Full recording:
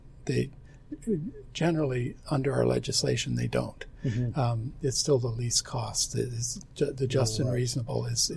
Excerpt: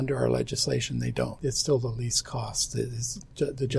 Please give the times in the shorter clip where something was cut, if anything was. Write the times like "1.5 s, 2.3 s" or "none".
1.3 s